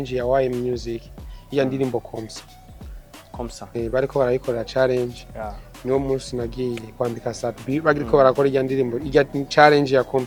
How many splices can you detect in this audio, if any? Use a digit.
0